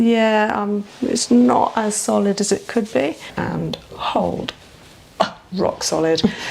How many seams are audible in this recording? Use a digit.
1